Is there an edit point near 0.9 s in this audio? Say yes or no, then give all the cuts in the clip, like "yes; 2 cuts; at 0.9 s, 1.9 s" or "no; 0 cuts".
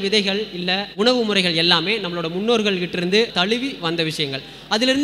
yes; 2 cuts; at 0.9 s, 3.3 s